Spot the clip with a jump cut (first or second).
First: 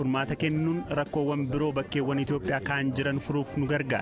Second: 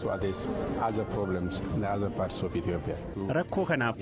second